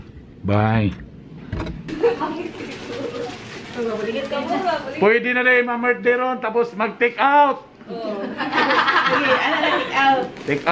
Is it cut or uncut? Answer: cut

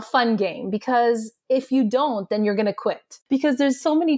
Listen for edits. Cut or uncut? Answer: cut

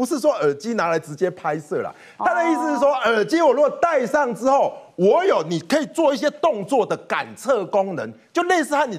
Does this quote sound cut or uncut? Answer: uncut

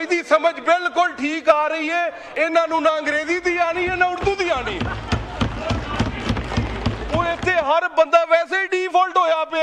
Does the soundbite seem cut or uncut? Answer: cut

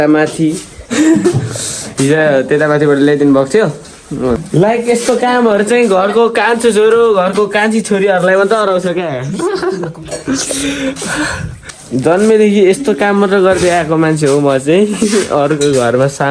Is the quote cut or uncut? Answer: cut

